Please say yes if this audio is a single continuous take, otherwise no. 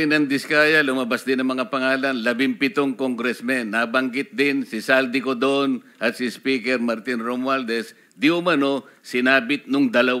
yes